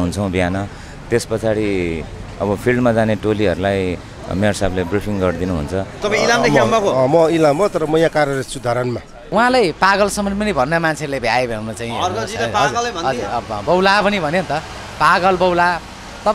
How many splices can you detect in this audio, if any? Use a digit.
2